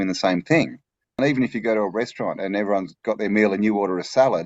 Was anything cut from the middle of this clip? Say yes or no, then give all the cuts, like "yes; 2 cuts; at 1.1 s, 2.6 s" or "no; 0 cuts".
yes; 1 cut; at 1.2 s